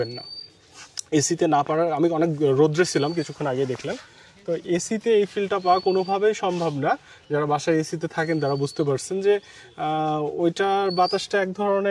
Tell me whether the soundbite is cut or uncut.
uncut